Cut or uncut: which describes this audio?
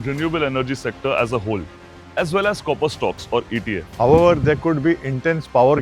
cut